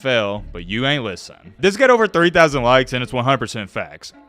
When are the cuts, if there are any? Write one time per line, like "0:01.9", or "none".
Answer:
0:01.4